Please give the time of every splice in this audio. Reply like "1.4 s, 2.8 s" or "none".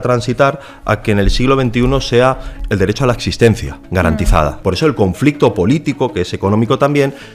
2.5 s, 4.6 s